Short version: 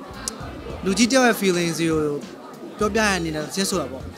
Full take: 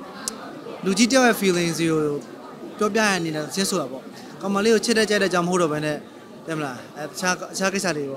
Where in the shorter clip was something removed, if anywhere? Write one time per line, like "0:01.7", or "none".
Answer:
none